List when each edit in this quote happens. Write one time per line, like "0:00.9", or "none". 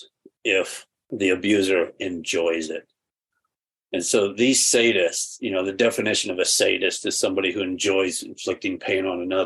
0:01.1